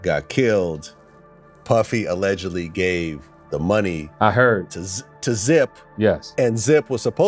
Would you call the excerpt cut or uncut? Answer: uncut